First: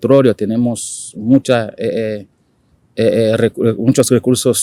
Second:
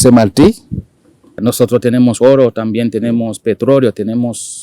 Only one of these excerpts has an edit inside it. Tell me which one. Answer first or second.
second